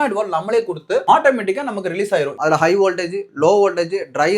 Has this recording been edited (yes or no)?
yes